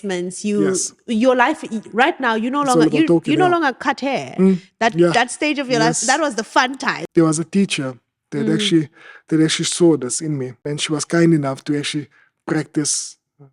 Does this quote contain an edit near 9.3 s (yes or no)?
no